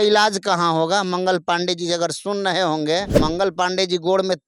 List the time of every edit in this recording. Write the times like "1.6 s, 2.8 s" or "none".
3.2 s

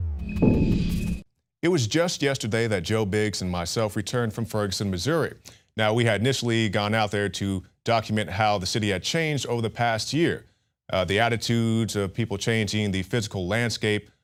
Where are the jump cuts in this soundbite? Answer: none

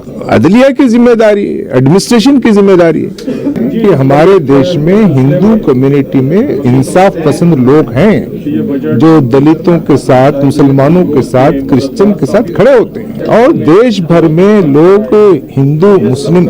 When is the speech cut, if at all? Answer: 3.6 s, 13.1 s

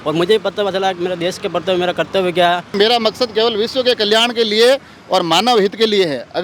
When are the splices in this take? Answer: 2.7 s

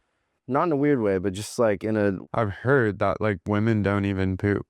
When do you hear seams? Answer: 2.2 s

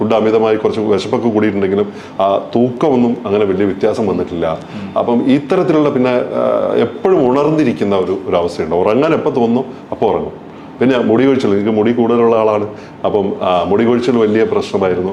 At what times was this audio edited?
none

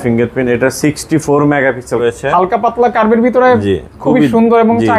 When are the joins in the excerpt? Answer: 2.0 s

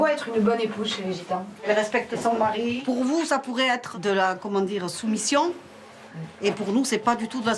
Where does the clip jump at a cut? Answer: 1.6 s, 2.8 s, 3.9 s

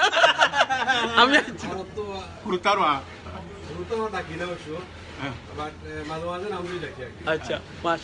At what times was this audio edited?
1.5 s

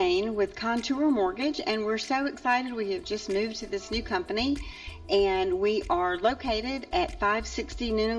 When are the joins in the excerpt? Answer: none

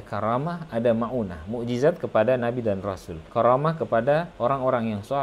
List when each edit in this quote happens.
none

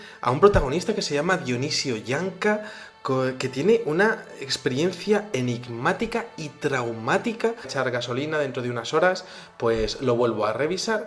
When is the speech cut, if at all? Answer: none

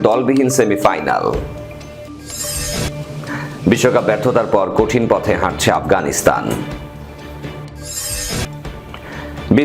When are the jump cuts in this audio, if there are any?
1.5 s

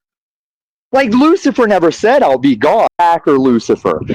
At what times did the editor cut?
2.9 s

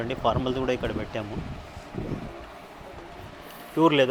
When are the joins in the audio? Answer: none

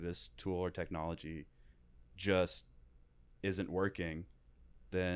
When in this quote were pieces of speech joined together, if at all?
none

